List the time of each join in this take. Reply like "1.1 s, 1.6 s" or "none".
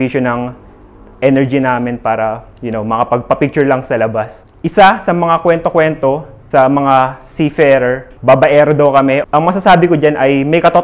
2.5 s, 6.3 s, 8.1 s, 9.2 s